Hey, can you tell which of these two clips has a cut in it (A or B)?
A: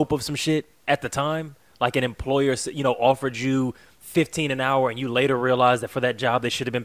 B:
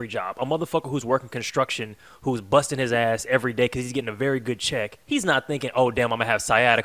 B